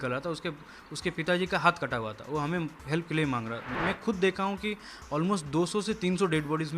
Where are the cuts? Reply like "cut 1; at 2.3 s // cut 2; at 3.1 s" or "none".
cut 1; at 3.7 s